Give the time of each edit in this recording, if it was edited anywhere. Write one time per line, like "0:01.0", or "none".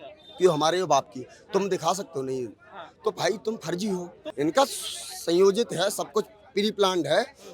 0:04.2